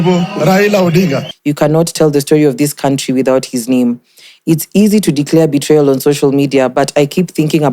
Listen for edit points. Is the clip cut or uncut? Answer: cut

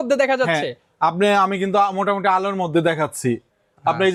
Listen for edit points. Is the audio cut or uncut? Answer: uncut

